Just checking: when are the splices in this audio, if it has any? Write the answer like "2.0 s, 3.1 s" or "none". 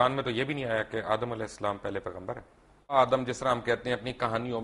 2.9 s